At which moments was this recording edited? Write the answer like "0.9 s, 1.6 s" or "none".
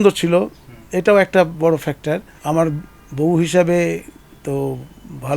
2.3 s